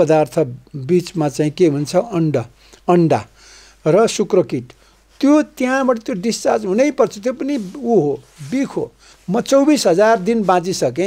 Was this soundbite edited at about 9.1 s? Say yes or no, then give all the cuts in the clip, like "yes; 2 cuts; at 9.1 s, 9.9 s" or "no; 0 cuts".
yes; 1 cut; at 9.1 s